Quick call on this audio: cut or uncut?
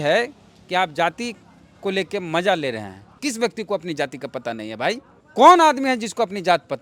cut